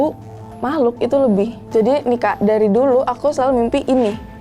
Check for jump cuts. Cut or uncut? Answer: cut